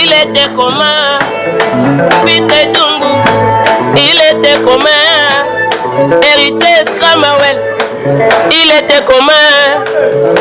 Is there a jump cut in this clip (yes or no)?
no